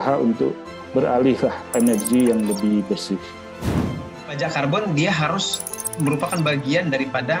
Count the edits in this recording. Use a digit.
1